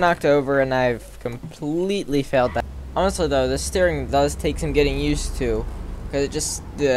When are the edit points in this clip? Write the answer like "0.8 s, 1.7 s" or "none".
2.6 s